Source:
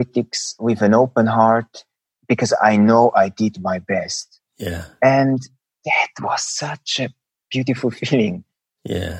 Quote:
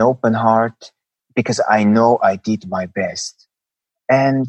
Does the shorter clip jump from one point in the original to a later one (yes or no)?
no